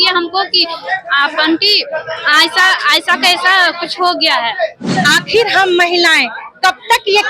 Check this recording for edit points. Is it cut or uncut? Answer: cut